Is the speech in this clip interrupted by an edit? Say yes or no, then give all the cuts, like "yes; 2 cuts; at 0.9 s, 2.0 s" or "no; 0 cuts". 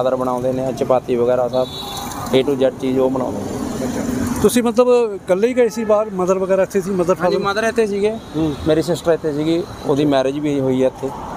no; 0 cuts